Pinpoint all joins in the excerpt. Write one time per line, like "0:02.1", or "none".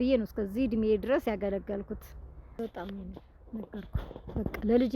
0:02.6